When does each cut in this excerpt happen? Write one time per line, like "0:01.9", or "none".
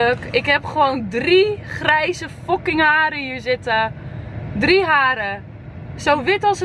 none